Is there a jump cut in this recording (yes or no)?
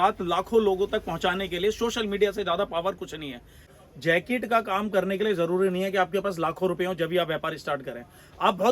yes